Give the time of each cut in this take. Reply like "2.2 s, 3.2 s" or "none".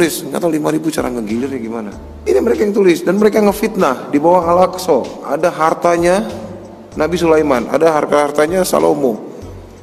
2.0 s